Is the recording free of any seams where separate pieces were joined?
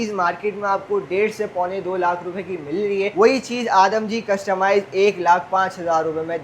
yes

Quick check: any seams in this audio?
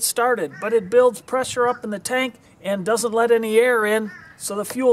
yes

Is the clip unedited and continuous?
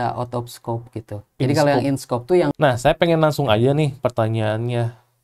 no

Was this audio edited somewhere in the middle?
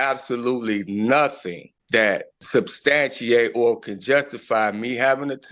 no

